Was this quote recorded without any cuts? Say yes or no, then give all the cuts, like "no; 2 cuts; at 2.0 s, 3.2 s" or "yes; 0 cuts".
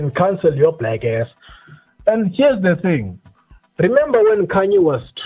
yes; 0 cuts